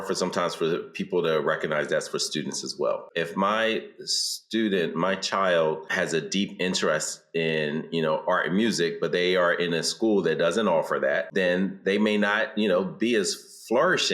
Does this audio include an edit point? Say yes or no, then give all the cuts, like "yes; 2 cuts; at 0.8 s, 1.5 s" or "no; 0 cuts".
yes; 3 cuts; at 3.1 s, 5.9 s, 11.3 s